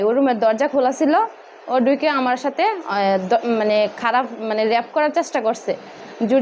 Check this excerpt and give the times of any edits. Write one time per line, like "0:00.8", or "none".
none